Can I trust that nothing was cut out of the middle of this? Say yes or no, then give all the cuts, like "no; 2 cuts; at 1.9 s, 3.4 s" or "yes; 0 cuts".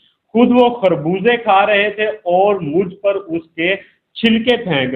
yes; 0 cuts